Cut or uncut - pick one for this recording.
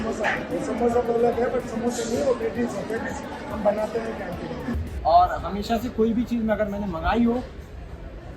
cut